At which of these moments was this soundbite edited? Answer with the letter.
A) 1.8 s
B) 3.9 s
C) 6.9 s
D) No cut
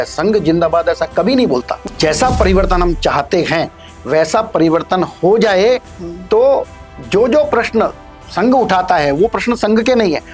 A